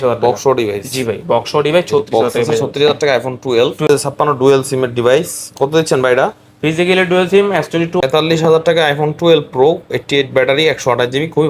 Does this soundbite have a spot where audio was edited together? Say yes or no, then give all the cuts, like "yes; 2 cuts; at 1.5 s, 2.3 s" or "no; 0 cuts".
yes; 2 cuts; at 3.9 s, 8.0 s